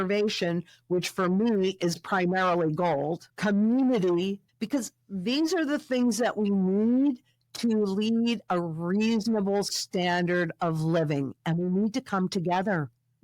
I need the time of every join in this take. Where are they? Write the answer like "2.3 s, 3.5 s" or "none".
3.3 s, 4.4 s